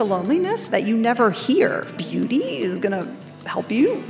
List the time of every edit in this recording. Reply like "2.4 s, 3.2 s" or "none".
1.9 s

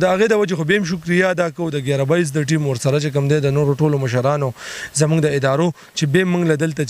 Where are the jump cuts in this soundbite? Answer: none

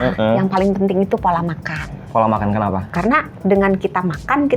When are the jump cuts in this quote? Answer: 2.0 s, 2.9 s

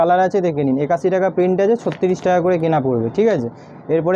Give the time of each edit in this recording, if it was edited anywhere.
none

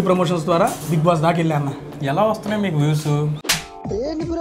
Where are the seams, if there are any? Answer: 3.4 s

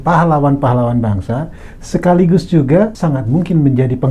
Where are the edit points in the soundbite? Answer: 2.9 s

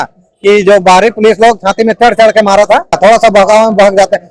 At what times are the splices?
2.9 s

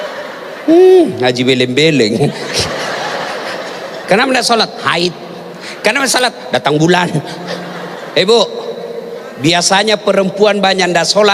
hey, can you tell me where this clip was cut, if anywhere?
4.0 s

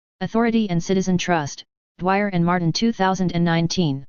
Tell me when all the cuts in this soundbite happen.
none

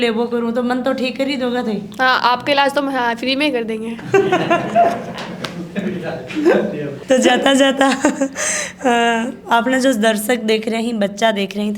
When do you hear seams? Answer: none

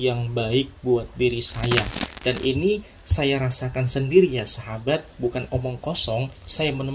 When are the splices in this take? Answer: 2.0 s

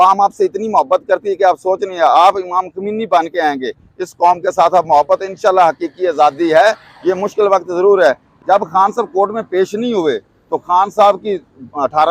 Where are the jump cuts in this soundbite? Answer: 8.3 s

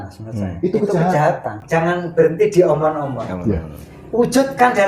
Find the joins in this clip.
1.6 s

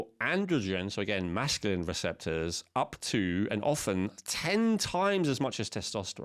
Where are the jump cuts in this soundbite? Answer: none

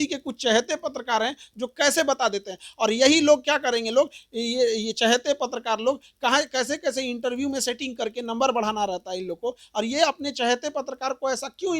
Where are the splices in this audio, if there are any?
none

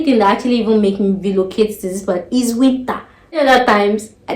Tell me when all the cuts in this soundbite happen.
3.4 s

